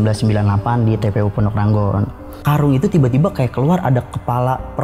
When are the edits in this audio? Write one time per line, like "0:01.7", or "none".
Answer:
0:02.4